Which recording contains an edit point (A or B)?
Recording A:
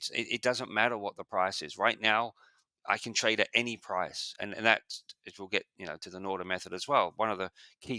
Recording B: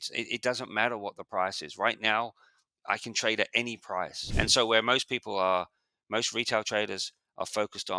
B